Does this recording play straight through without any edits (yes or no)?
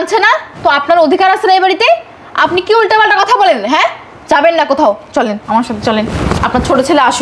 yes